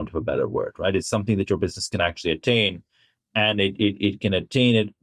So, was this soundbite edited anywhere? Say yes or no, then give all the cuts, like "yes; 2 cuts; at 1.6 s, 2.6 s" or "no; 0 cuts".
no; 0 cuts